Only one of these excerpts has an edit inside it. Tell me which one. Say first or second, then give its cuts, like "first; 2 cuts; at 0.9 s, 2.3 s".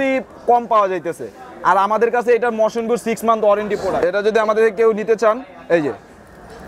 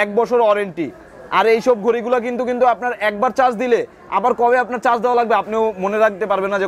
first; 1 cut; at 4.0 s